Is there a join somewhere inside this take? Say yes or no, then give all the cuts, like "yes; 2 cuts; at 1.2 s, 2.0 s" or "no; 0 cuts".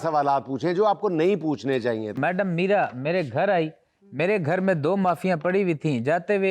yes; 1 cut; at 2.2 s